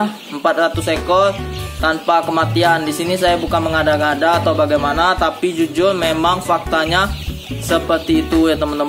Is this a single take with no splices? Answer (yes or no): yes